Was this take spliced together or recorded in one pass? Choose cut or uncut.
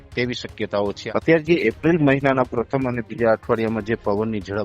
cut